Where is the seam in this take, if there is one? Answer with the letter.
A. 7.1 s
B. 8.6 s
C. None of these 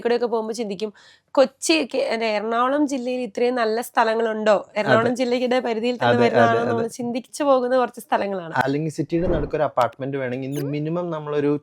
B